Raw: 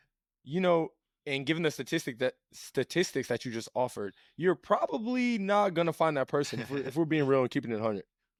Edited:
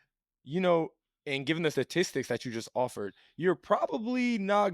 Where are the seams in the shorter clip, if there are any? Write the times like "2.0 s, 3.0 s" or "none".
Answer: 1.7 s